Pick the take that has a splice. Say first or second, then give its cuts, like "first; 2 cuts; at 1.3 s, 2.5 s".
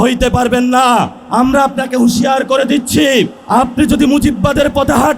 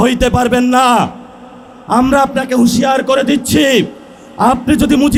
first; 2 cuts; at 1.2 s, 3.4 s